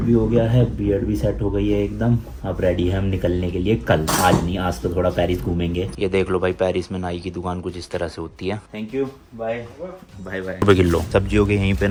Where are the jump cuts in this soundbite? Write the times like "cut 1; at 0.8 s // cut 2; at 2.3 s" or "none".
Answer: none